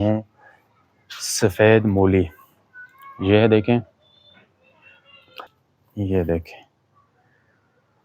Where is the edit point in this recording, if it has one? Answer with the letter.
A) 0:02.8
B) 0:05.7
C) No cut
B